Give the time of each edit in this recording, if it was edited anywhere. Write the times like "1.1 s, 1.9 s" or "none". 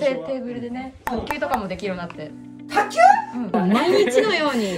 3.4 s

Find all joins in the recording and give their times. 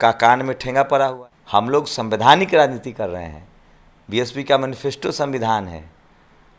1.2 s

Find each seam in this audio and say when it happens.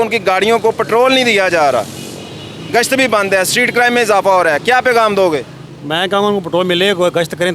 none

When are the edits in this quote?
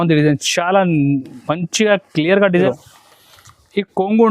2.7 s

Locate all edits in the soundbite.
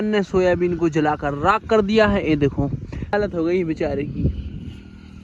3.1 s

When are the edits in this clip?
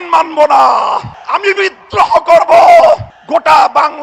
1.1 s, 3.1 s

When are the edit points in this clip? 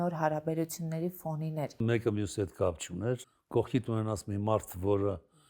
1.8 s, 3.3 s

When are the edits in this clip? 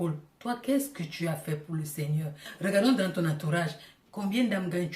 2.5 s

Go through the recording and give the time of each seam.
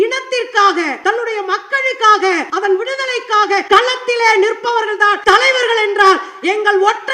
0.9 s, 2.5 s, 3.6 s, 5.2 s

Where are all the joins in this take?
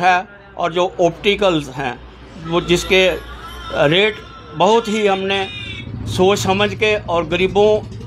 none

